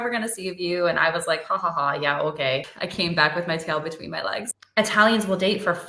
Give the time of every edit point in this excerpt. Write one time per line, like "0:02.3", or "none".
0:02.8
0:04.6